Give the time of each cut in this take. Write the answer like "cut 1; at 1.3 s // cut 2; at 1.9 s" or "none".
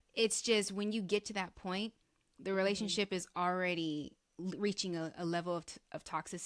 none

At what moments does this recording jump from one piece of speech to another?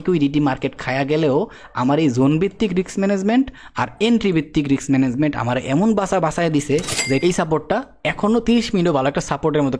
cut 1; at 7.2 s

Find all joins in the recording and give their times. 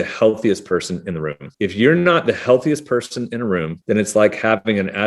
none

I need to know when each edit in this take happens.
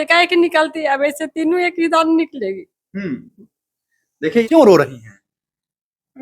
cut 1; at 4.4 s

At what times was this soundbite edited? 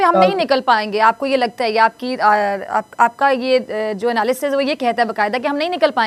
none

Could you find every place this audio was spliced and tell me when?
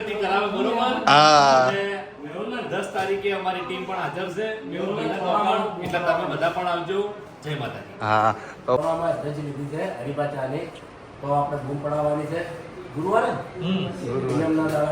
cut 1; at 8.8 s

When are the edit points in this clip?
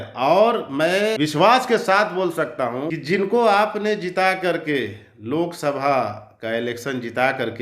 cut 1; at 1.2 s // cut 2; at 3.0 s

